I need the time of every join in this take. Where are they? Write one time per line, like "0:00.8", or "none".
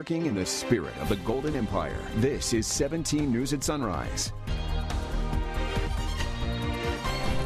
none